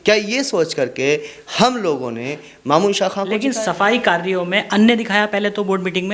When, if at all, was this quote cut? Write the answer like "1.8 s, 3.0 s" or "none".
3.4 s